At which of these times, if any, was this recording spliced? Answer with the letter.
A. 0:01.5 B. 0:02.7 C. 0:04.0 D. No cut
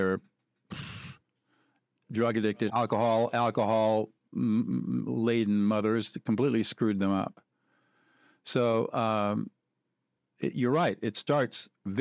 B